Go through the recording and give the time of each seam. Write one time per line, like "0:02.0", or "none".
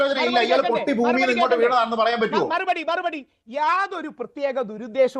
0:02.5